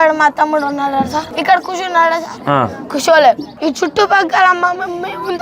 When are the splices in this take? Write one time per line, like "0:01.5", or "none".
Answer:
0:01.3
0:02.5
0:03.5